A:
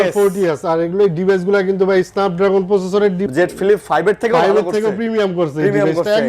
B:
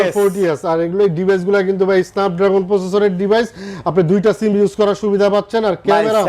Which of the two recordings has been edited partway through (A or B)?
A